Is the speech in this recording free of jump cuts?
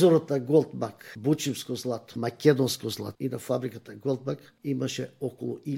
no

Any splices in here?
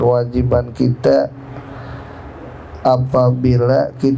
no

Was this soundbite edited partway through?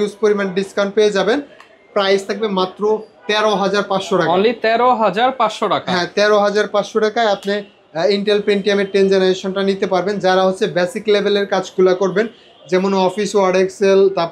no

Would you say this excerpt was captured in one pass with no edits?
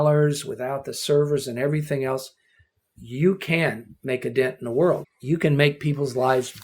no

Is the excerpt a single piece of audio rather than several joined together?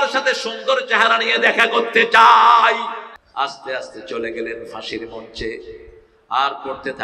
no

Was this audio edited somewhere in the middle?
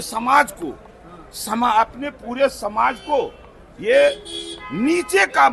no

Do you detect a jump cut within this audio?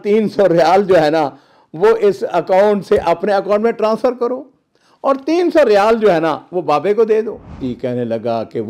yes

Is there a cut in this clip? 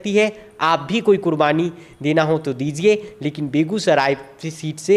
no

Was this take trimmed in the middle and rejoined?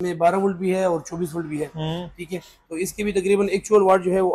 no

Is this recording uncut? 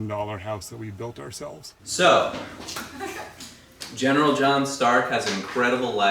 no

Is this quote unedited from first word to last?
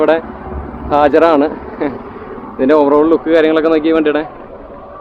yes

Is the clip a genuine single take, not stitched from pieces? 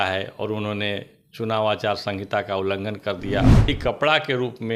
no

